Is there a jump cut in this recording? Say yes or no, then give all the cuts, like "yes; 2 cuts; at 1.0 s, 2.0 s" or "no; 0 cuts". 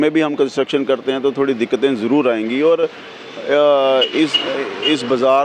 no; 0 cuts